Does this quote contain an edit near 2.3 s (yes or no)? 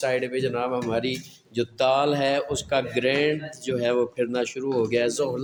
no